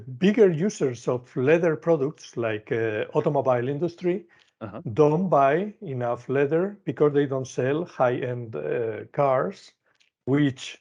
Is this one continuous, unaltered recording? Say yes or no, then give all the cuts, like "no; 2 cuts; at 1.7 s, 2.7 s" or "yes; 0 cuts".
yes; 0 cuts